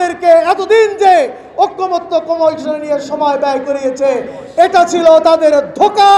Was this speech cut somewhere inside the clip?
no; 0 cuts

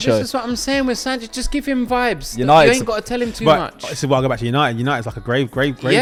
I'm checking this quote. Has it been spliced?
no; 0 cuts

